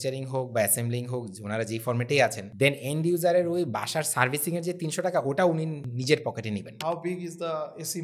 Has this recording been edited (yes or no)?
yes